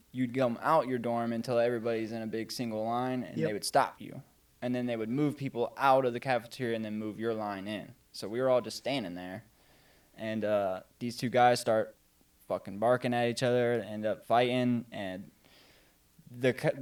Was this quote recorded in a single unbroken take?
yes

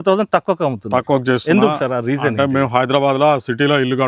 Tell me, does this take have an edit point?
no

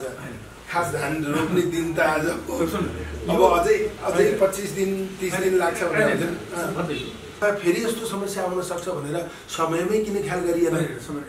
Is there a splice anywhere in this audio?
yes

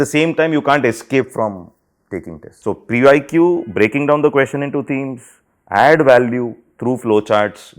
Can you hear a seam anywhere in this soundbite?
yes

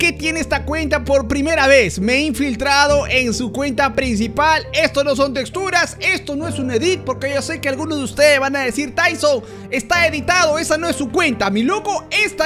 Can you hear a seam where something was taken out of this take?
no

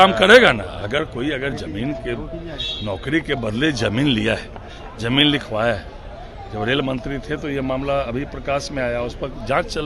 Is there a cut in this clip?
no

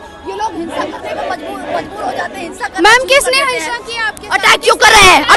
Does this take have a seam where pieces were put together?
no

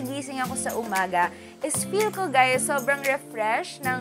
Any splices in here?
no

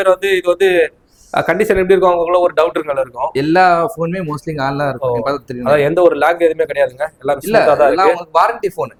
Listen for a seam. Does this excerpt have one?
no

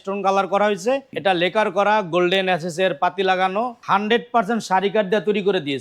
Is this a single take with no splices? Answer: no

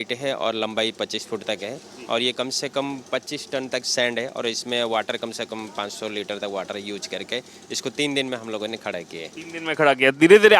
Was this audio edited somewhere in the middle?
no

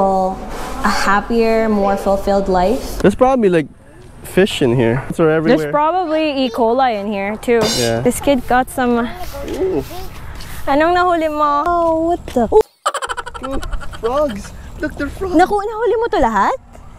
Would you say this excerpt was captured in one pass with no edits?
no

